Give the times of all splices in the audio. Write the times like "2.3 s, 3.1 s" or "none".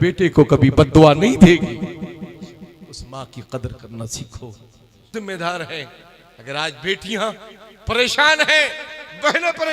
5.1 s